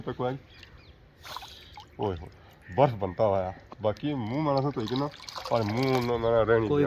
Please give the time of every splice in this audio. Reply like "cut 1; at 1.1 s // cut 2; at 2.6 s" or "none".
cut 1; at 1.1 s